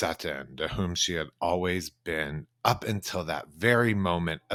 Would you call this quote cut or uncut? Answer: uncut